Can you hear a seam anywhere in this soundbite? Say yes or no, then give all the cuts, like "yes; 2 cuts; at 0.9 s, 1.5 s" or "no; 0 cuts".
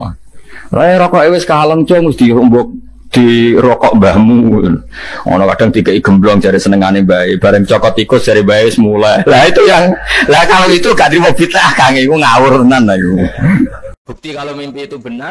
yes; 1 cut; at 14.0 s